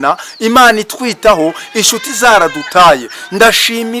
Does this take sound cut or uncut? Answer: uncut